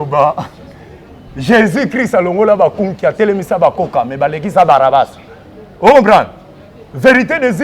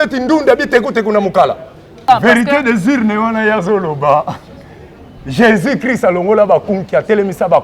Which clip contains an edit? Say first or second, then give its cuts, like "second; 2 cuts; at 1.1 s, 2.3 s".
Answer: second; 1 cut; at 2.0 s